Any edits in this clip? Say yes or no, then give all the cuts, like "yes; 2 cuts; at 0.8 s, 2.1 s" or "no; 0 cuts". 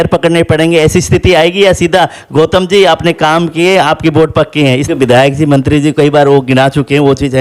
yes; 1 cut; at 4.8 s